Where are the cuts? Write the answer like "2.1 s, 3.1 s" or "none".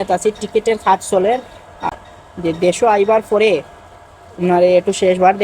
1.7 s